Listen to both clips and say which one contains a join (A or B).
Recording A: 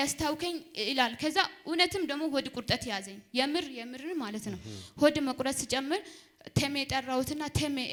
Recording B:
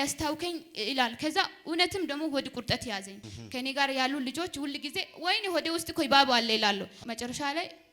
B